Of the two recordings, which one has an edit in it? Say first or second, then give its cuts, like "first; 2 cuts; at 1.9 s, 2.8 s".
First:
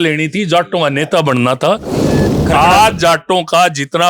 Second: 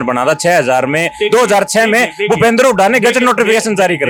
first; 1 cut; at 2.3 s